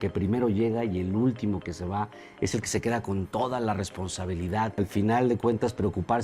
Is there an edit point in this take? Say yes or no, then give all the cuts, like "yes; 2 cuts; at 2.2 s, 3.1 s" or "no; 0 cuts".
yes; 1 cut; at 4.8 s